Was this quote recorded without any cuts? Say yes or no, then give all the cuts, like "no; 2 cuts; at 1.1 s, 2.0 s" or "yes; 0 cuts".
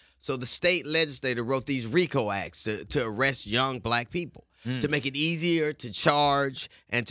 yes; 0 cuts